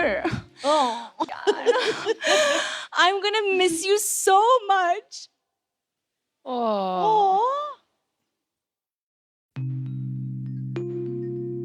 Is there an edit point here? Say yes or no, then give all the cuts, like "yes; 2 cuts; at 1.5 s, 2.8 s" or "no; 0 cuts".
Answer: yes; 1 cut; at 1.3 s